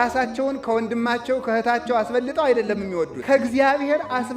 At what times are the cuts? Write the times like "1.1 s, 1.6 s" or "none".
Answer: 3.2 s